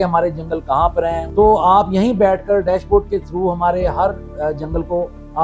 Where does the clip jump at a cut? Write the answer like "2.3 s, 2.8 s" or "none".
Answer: 1.2 s